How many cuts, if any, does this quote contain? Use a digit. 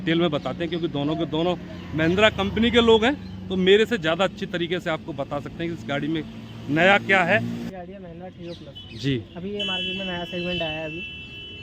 1